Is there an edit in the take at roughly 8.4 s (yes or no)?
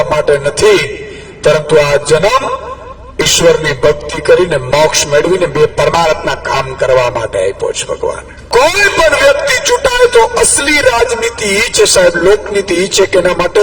yes